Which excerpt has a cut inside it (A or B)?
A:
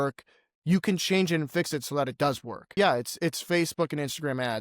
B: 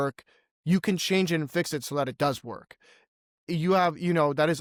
A